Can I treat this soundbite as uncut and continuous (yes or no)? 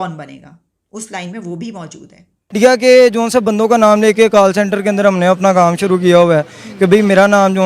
no